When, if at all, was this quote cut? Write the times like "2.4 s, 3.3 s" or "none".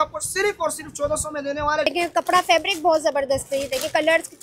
1.9 s